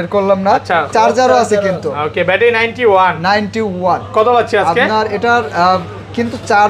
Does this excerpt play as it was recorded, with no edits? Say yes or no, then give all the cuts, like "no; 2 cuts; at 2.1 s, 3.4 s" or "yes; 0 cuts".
yes; 0 cuts